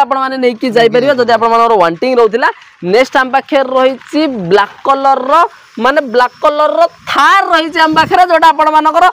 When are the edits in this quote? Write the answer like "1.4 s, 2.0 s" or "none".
none